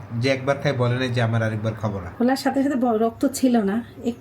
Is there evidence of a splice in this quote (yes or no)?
yes